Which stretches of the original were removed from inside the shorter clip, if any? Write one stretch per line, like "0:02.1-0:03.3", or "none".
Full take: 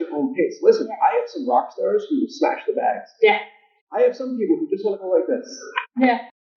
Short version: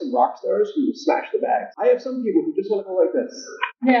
0:03.0-0:03.8